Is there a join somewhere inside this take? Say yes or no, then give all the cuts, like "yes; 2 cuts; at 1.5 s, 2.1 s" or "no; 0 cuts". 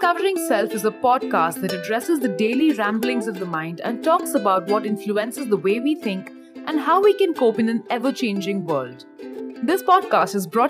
no; 0 cuts